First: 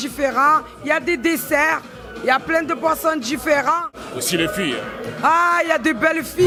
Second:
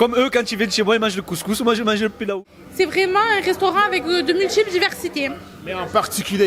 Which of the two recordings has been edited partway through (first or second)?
second